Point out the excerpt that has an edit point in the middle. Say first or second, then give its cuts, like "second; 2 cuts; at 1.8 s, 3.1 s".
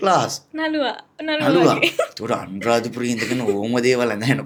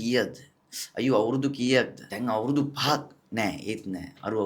second; 1 cut; at 2.0 s